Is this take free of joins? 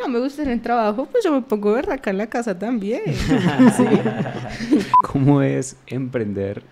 no; 1 cut; at 5.0 s

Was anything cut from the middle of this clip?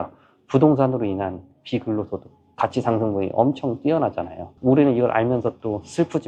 no; 0 cuts

